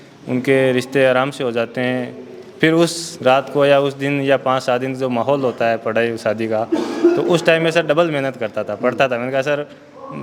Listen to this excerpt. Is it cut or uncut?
uncut